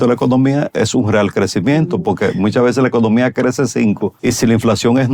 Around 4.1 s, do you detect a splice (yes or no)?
yes